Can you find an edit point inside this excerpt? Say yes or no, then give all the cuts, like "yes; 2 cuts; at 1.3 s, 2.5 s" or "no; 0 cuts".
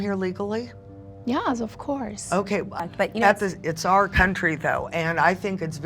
yes; 1 cut; at 2.8 s